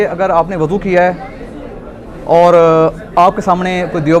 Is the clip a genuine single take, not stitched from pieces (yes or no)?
yes